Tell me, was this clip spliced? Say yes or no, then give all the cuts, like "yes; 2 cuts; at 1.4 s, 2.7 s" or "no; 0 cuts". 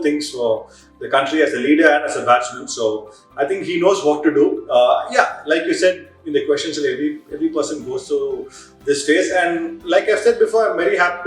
no; 0 cuts